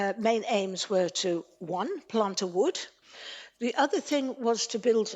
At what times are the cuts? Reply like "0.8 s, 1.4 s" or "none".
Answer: 2.9 s